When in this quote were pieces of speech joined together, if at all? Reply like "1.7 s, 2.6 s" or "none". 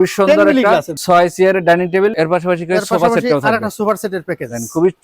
0.9 s, 2.1 s